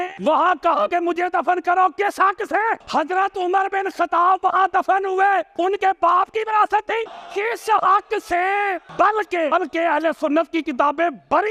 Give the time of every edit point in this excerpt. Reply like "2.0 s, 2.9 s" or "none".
none